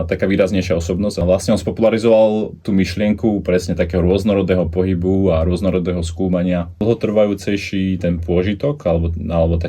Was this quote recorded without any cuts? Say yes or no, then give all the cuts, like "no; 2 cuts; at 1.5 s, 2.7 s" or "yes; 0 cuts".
no; 2 cuts; at 1.2 s, 6.8 s